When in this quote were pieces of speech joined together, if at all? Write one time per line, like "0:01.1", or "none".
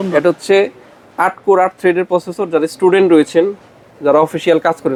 none